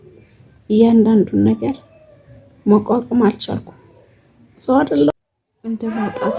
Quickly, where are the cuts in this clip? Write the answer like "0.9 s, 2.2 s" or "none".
5.1 s